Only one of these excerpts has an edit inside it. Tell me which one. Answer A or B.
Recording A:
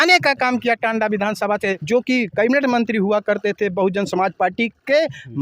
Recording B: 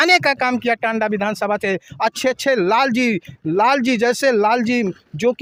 A